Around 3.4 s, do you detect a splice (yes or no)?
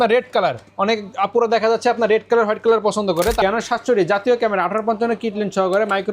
yes